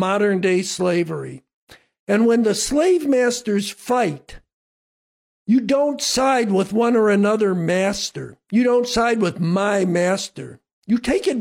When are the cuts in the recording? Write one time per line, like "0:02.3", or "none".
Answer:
none

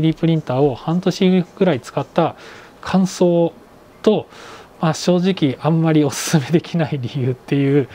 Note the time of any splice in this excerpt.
none

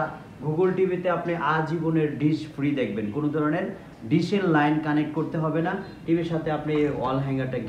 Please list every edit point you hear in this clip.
0:05.9

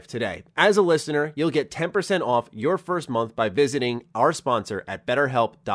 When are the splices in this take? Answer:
none

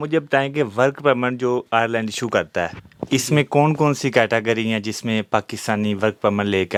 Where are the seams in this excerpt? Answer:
none

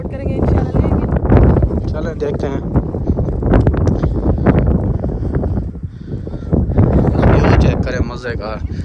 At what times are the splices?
none

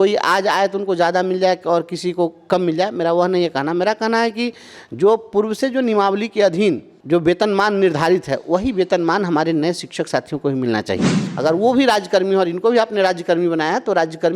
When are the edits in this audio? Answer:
0:06.9
0:11.2

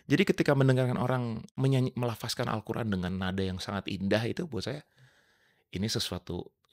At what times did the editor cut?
0:01.5

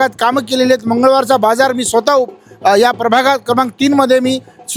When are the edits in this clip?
none

